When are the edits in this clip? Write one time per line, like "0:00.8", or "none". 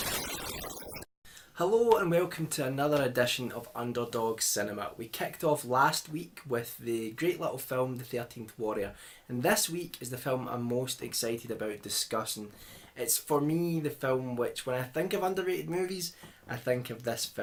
none